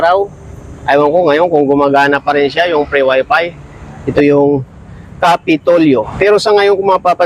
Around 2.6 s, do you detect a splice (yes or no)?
no